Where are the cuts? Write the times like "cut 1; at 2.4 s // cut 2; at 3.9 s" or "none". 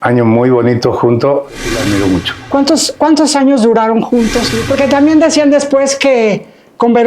cut 1; at 1.7 s // cut 2; at 4.5 s

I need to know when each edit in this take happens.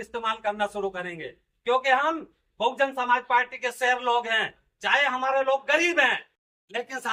none

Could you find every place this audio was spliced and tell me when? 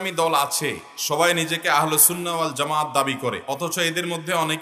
cut 1; at 3.4 s

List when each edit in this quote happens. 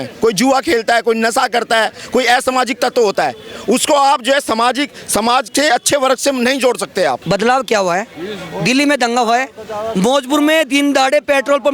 cut 1; at 7.2 s

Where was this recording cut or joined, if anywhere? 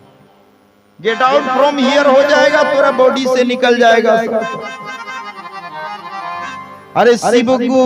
none

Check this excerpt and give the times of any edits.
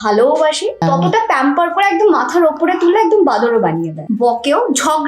cut 1; at 0.8 s // cut 2; at 3.9 s

